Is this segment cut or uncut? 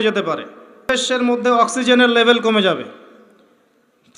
cut